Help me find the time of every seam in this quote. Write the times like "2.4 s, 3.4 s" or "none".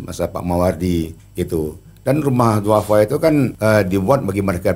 1.2 s, 3.5 s